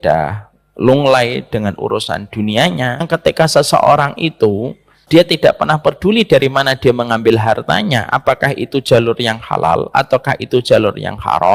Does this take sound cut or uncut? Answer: cut